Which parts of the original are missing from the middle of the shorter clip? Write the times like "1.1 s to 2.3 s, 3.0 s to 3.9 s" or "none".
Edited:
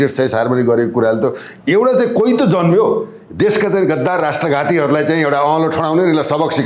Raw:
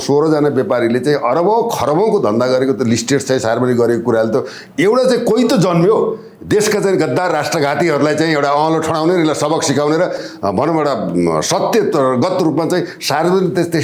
none